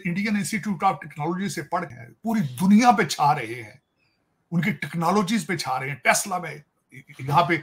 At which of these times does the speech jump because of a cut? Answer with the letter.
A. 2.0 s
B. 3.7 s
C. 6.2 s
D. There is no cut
A